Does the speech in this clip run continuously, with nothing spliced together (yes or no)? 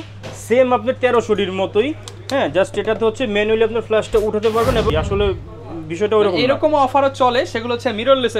no